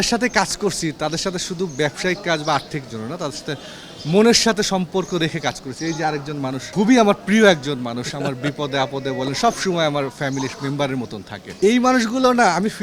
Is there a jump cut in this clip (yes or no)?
no